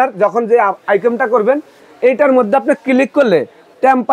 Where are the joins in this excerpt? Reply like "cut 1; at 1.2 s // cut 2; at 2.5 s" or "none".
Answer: none